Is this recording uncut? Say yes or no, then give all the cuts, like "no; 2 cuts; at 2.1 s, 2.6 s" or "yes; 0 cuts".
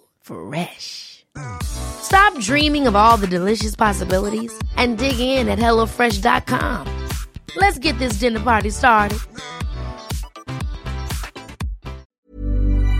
no; 1 cut; at 12.0 s